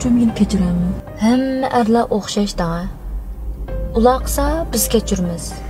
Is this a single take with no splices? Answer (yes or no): no